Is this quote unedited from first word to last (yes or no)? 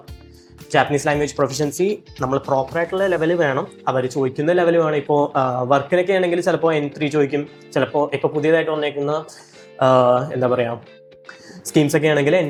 yes